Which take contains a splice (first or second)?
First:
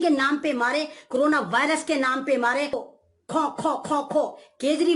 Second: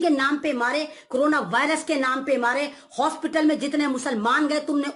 first